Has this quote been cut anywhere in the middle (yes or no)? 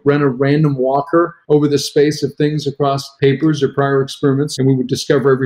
yes